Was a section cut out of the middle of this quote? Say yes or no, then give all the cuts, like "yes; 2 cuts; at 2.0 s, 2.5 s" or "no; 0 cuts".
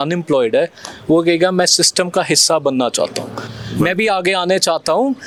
no; 0 cuts